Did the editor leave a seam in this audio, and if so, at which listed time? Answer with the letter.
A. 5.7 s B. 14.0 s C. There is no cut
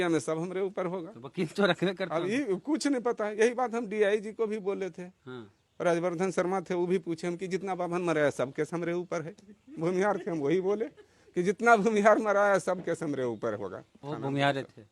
B